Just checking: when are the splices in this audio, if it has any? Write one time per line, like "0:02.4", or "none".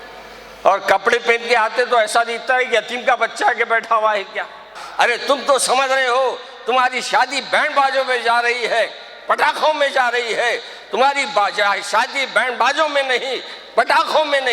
0:04.8